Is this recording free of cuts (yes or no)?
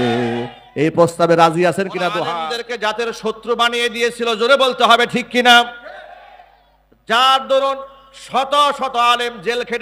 no